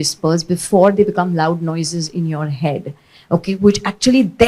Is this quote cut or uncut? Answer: uncut